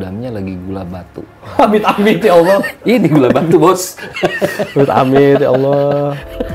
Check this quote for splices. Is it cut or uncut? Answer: uncut